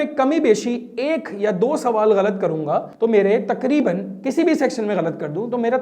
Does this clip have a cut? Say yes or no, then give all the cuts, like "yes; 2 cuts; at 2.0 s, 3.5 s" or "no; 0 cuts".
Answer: yes; 1 cut; at 2.9 s